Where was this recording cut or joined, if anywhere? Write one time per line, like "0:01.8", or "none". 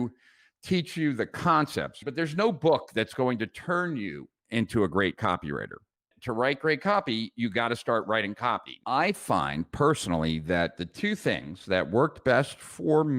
0:02.0
0:08.7